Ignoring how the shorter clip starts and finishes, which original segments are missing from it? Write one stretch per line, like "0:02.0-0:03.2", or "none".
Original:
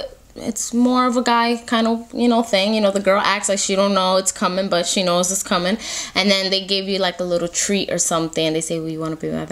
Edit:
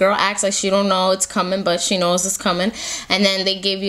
none